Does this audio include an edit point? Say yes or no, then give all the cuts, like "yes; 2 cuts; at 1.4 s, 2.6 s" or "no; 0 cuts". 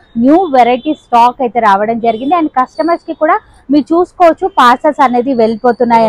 no; 0 cuts